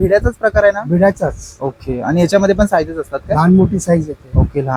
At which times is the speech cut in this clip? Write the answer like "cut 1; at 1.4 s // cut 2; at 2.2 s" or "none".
none